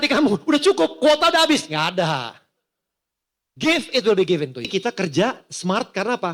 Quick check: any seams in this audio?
yes; 1 cut; at 4.7 s

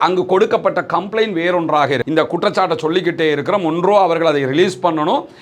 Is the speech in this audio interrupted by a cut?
yes; 1 cut; at 2.0 s

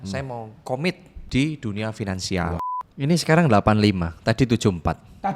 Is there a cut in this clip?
yes; 2 cuts; at 1.1 s, 2.7 s

